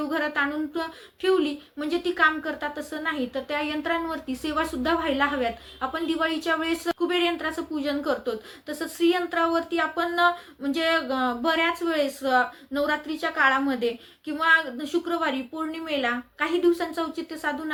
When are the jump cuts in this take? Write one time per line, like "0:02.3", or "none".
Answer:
none